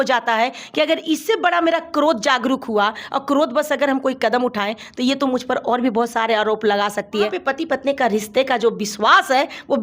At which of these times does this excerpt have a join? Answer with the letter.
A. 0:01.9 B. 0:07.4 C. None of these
B